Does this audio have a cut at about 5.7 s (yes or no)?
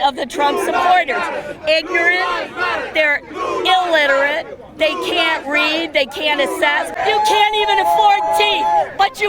no